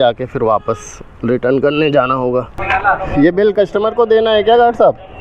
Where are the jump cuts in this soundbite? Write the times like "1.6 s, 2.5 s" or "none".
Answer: 2.6 s